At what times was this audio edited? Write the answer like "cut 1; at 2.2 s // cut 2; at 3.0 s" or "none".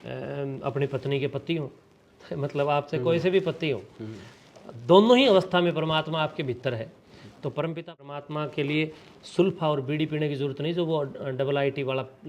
cut 1; at 8.1 s